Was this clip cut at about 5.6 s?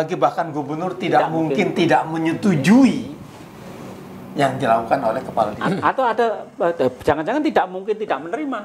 yes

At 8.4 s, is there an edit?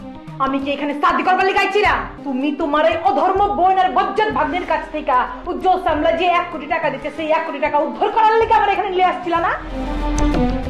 no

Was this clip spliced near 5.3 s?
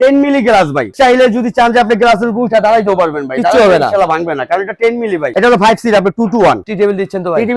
yes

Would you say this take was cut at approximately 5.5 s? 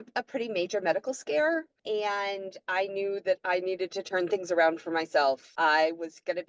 yes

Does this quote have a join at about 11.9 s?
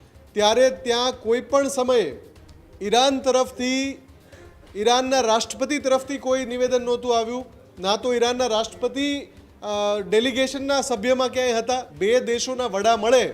yes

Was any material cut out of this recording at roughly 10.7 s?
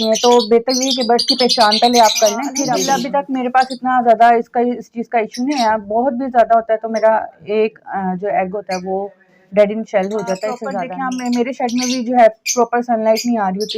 yes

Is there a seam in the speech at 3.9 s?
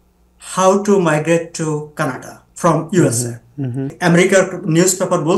yes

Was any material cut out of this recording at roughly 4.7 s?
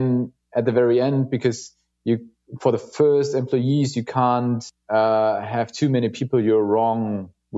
yes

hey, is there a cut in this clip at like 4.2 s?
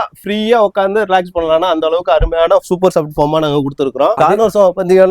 yes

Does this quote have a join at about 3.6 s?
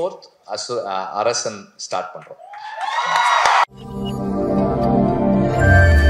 yes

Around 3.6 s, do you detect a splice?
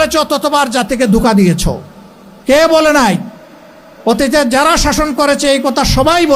no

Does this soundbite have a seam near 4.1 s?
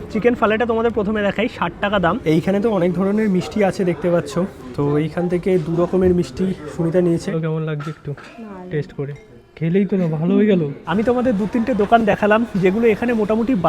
no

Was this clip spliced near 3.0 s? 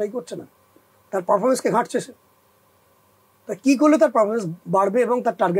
no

